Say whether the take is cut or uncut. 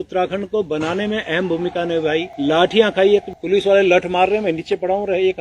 cut